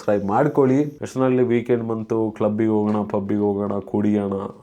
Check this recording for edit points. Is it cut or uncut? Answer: cut